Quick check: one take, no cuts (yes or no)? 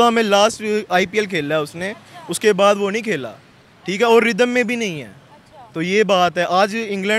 yes